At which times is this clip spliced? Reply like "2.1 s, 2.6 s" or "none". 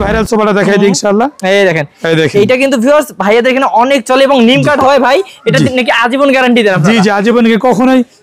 none